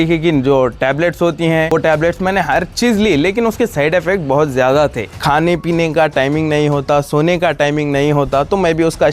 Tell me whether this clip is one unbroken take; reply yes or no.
no